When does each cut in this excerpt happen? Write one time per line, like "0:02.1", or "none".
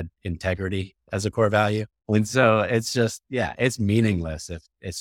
0:01.9

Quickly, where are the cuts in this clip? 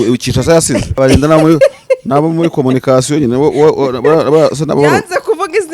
0:00.9

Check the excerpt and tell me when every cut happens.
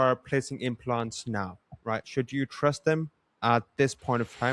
none

